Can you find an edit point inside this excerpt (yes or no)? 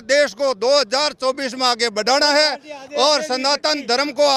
no